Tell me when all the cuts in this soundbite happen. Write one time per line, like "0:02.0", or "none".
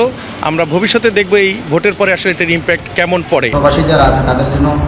0:03.5

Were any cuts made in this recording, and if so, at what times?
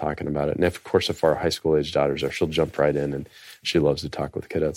none

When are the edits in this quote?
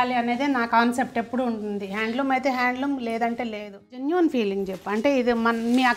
0:03.9

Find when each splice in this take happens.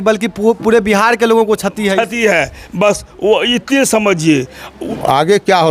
0:04.7

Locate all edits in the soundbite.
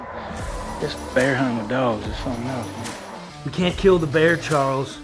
0:03.0

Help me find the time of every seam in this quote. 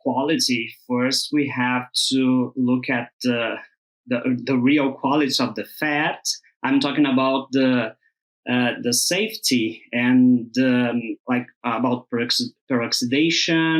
none

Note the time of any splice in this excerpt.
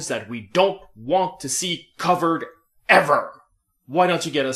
0:02.3

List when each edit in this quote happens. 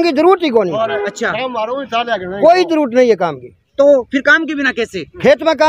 none

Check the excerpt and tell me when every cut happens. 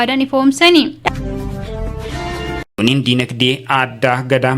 0:01.0
0:02.7

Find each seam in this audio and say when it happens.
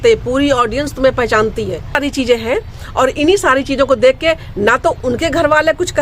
0:02.0

